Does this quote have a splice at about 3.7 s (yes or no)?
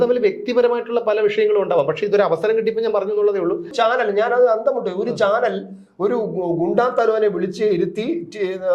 yes